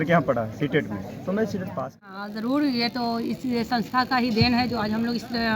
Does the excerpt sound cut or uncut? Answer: cut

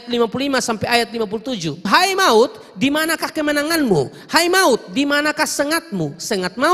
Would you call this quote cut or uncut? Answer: cut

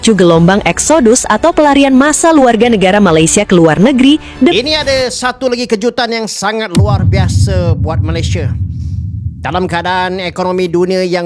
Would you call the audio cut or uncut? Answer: cut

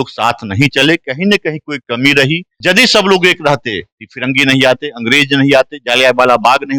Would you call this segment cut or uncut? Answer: cut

